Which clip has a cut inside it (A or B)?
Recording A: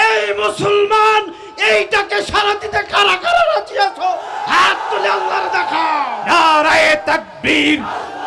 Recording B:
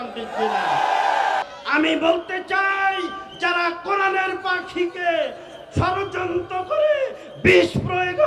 B